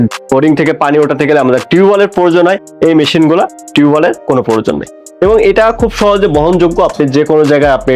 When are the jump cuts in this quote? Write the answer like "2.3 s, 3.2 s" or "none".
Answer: none